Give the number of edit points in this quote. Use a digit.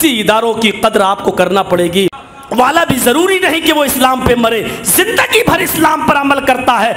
1